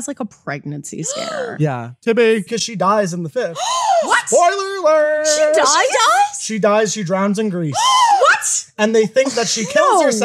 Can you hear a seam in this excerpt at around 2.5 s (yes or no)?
yes